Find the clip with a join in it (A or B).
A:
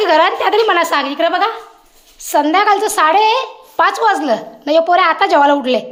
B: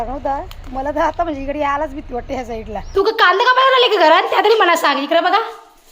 B